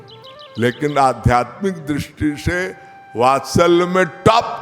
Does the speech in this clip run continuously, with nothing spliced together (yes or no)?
yes